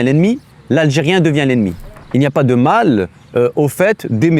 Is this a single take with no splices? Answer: no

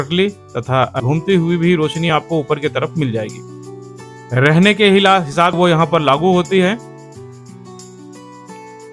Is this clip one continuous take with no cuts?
no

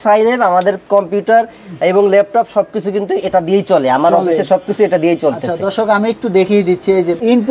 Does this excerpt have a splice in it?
no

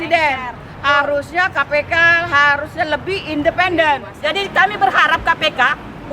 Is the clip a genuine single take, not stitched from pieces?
no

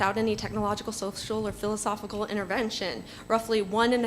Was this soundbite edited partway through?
yes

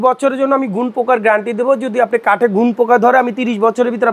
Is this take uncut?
yes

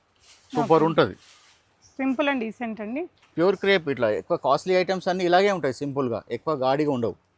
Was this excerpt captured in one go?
yes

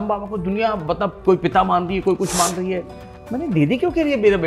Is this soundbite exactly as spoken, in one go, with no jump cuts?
yes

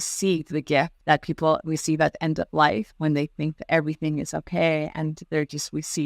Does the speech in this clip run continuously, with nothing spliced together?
no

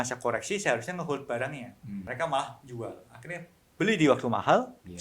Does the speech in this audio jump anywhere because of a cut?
yes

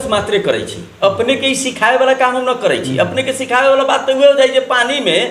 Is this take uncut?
yes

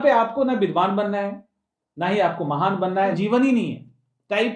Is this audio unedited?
no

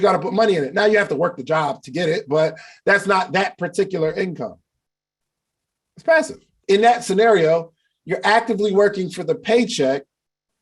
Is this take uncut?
no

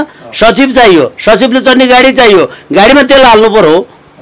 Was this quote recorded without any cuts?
yes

